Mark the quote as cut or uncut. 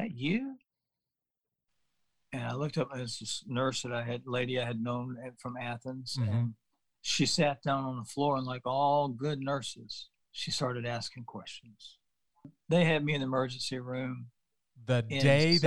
cut